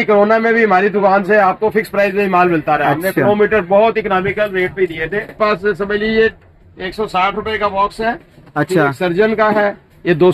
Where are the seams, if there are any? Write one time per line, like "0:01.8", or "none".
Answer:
0:05.4